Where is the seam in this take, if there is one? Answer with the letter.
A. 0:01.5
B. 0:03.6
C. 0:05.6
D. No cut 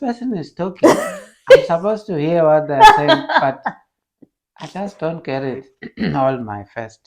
C